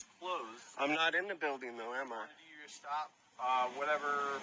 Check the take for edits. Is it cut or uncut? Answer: uncut